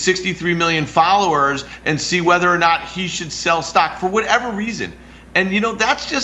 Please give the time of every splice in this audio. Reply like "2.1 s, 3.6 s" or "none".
none